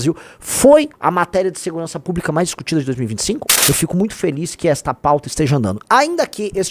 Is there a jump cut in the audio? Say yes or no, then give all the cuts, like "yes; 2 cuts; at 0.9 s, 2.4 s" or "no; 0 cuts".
yes; 1 cut; at 3.5 s